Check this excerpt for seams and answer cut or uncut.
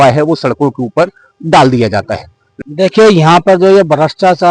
cut